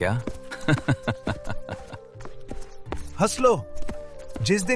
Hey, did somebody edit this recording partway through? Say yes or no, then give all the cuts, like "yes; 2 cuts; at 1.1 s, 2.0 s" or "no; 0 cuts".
no; 0 cuts